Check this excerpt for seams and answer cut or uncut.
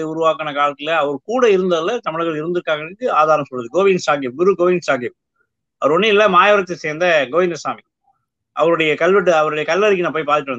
uncut